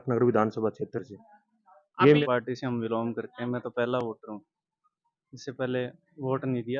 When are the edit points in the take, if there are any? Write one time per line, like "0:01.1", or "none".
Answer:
0:02.2